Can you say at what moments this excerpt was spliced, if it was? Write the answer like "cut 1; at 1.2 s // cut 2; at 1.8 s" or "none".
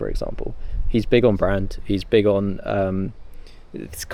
none